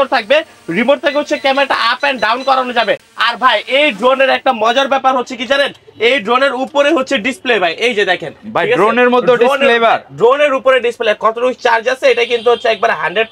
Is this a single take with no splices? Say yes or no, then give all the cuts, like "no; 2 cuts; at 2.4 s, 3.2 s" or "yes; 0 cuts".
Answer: yes; 0 cuts